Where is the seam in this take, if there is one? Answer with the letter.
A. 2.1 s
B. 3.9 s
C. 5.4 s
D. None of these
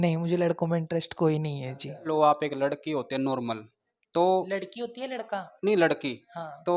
A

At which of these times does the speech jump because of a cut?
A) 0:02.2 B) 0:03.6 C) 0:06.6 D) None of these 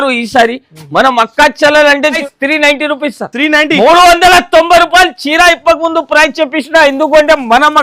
A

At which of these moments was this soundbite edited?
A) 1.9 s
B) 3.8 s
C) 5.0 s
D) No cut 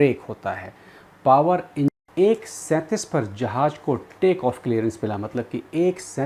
A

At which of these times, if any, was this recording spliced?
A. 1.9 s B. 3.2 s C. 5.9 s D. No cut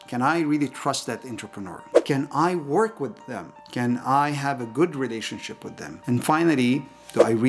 A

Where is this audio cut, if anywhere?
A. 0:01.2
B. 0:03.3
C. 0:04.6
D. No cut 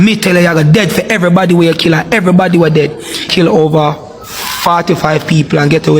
B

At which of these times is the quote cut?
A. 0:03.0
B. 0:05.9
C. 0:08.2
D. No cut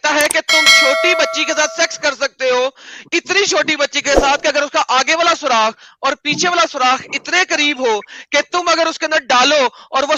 D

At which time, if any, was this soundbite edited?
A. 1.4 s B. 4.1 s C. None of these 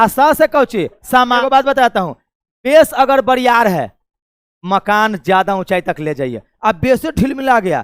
A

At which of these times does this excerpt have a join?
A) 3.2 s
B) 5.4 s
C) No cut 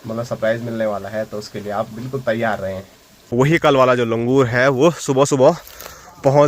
A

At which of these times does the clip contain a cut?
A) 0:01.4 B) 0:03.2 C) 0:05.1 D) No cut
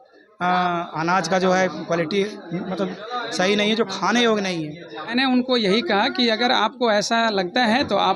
C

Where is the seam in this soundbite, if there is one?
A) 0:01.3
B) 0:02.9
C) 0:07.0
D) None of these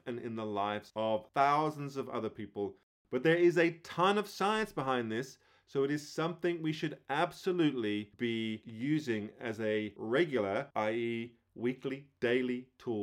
B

